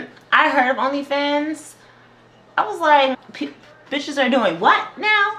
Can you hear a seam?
yes; 1 cut; at 3.3 s

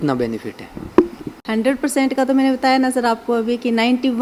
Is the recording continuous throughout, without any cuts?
yes; 0 cuts

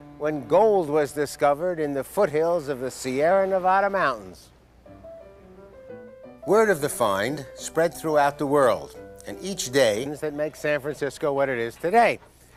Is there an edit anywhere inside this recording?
no; 0 cuts

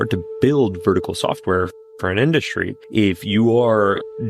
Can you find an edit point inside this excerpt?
no; 0 cuts

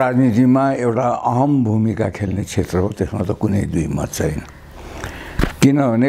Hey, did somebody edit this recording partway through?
no; 0 cuts

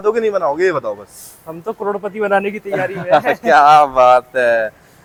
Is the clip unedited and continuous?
yes; 0 cuts

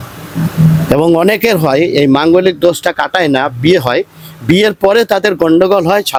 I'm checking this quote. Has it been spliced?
no; 0 cuts

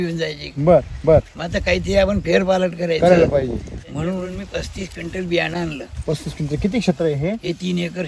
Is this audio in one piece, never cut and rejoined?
no; 1 cut; at 4.2 s

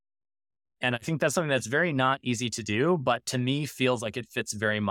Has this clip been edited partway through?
no; 0 cuts

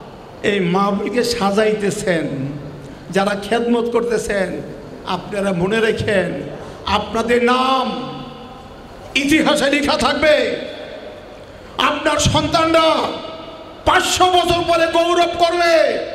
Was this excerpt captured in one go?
yes; 0 cuts

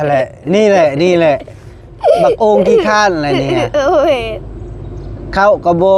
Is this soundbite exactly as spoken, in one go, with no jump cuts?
yes; 0 cuts

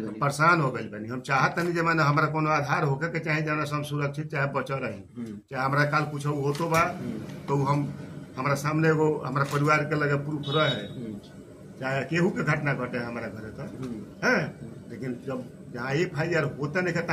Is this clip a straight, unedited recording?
yes; 0 cuts

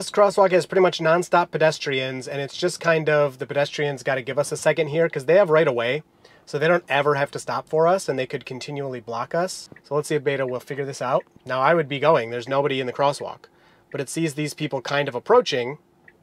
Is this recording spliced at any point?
yes; 2 cuts; at 9.7 s, 11.4 s

